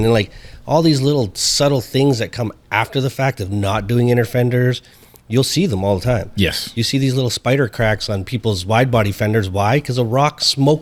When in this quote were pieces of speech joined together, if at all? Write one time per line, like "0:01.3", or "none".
none